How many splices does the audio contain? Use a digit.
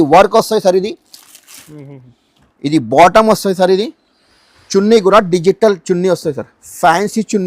0